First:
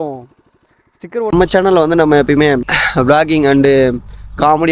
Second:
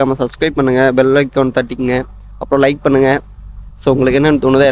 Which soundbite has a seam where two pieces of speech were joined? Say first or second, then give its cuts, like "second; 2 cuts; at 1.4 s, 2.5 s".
first; 1 cut; at 1.3 s